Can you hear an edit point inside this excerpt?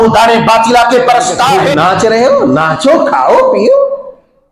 yes; 1 cut; at 1.6 s

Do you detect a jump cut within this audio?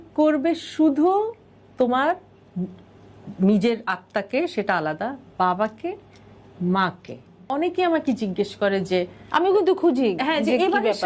yes; 1 cut; at 7.4 s

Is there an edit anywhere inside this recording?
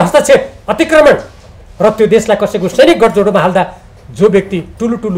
no; 0 cuts

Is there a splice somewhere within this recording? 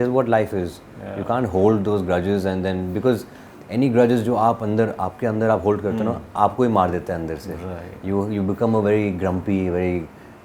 no; 0 cuts

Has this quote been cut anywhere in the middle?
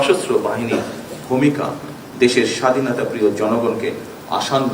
no; 0 cuts

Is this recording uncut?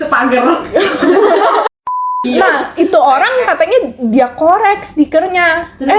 no; 1 cut; at 1.8 s

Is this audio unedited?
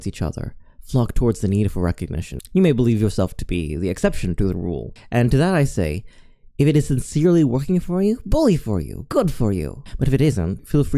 no; 1 cut; at 2.4 s

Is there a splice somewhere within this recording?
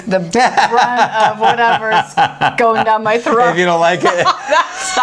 no; 0 cuts

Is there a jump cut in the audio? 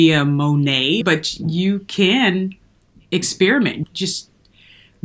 yes; 2 cuts; at 1.0 s, 3.8 s

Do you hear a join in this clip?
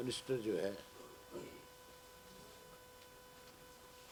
no; 0 cuts

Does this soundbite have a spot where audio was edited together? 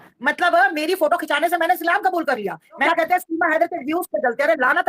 yes; 1 cut; at 2.8 s

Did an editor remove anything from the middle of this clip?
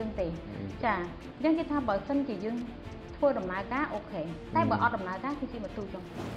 no; 0 cuts

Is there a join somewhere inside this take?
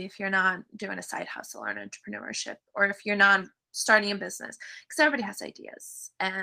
no; 0 cuts

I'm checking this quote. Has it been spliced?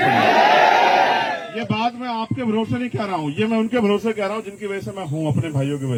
no; 0 cuts

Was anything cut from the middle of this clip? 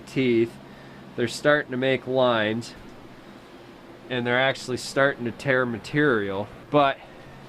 yes; 1 cut; at 6.6 s

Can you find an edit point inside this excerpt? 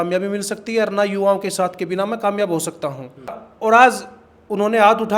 yes; 1 cut; at 3.4 s

